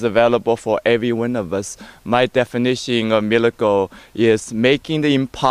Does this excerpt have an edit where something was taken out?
yes; 1 cut; at 4.4 s

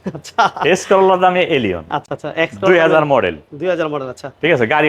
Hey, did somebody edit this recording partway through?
no; 0 cuts

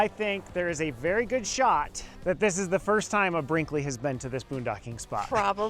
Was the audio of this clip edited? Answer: yes; 1 cut; at 2.1 s

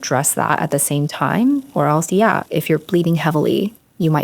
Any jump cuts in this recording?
yes; 1 cut; at 2.4 s

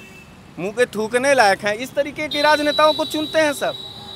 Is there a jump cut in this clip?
no; 0 cuts

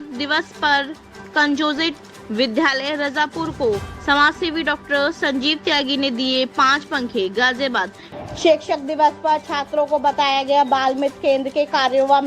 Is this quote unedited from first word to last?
no; 1 cut; at 8.0 s

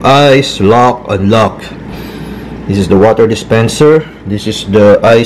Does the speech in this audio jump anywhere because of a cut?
no; 0 cuts

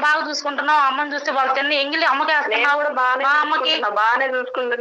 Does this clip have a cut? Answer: no; 0 cuts

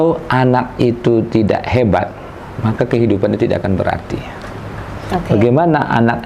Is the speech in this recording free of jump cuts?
yes; 0 cuts

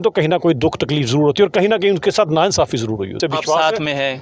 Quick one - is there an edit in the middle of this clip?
yes; 1 cut; at 3.2 s

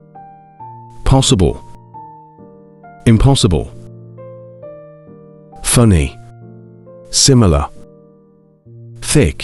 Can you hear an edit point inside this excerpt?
no; 0 cuts

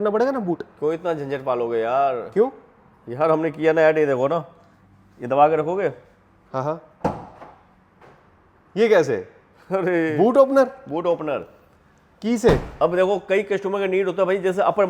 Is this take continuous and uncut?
yes; 0 cuts

